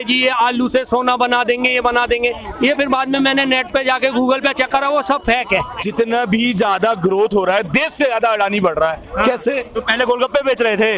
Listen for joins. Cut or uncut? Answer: cut